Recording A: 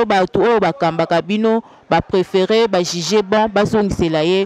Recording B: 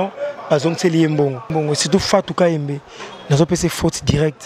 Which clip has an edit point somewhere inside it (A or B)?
B